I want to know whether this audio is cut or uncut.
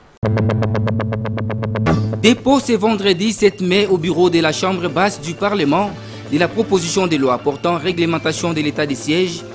cut